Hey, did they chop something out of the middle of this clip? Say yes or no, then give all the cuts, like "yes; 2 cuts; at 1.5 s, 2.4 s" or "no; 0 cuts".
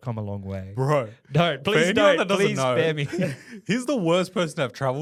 no; 0 cuts